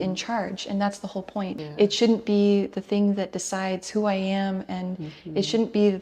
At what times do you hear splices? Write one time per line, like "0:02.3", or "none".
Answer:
0:01.6